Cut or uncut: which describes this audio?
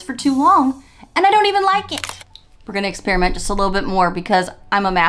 uncut